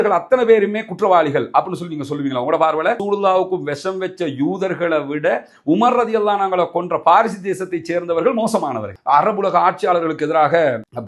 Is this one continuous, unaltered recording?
no; 1 cut; at 8.9 s

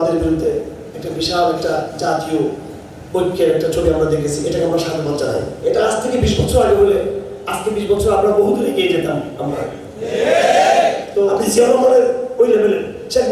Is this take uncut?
no; 2 cuts; at 5.5 s, 11.4 s

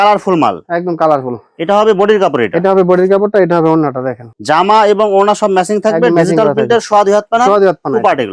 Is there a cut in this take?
no; 0 cuts

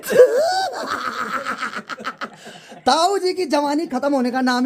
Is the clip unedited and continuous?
yes; 0 cuts

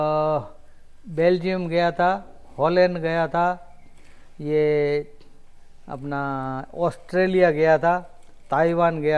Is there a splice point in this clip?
no; 0 cuts

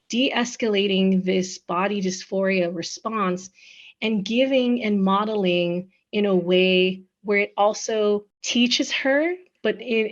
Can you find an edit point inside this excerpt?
yes; 1 cut; at 8.4 s

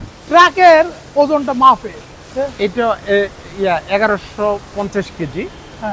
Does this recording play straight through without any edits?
no; 1 cut; at 2.3 s

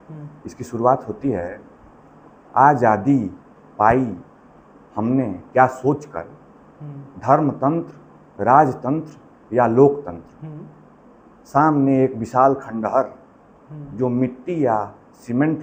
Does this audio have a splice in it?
no; 0 cuts

